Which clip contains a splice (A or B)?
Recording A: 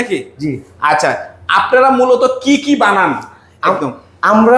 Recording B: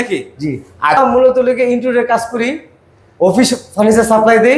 B